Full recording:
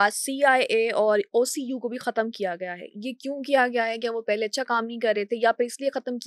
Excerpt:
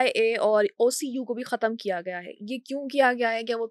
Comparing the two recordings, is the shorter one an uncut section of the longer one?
yes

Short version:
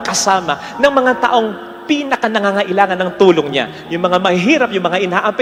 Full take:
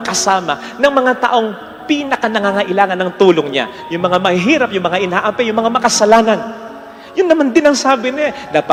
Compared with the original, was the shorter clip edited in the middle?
no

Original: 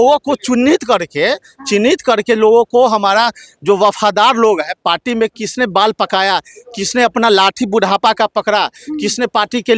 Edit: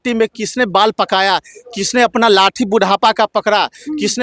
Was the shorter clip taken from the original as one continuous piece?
yes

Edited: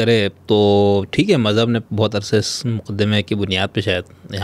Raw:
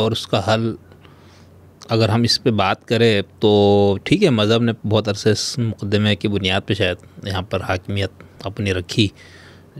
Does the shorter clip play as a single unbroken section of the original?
yes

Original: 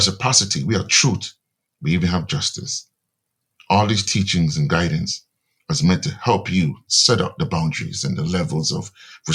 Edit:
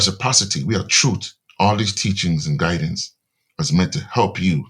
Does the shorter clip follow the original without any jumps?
no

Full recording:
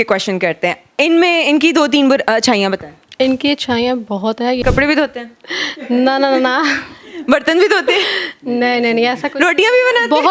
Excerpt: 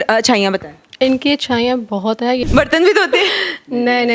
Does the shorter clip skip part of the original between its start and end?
yes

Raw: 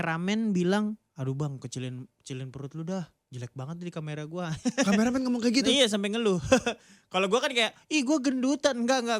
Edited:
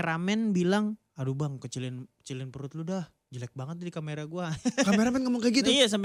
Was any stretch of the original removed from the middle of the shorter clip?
no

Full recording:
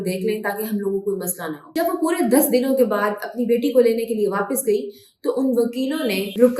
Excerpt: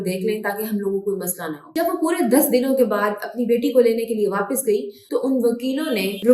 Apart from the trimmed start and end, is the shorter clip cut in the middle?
yes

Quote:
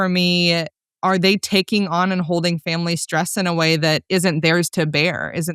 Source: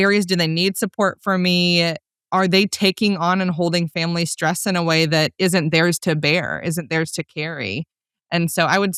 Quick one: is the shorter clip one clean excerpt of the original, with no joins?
yes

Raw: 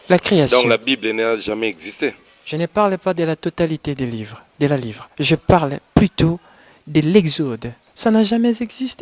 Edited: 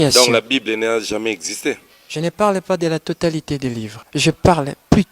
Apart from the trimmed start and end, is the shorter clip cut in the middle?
yes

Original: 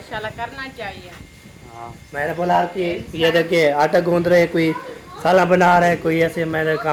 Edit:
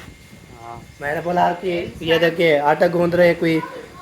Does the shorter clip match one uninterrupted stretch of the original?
yes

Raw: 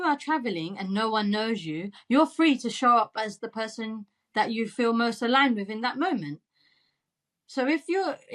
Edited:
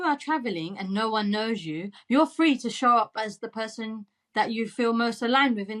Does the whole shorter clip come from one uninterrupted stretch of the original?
yes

